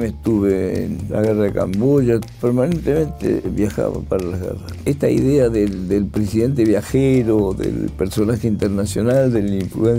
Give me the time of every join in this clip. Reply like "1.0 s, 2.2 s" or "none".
1.0 s, 2.3 s, 4.7 s